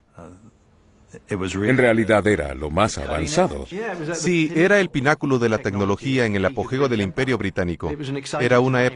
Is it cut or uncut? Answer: cut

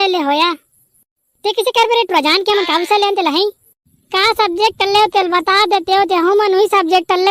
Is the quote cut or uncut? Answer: uncut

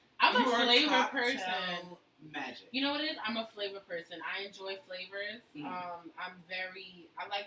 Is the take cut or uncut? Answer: uncut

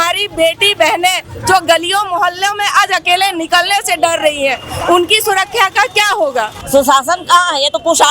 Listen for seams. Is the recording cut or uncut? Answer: cut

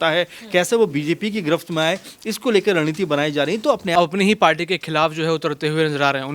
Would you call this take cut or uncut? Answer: cut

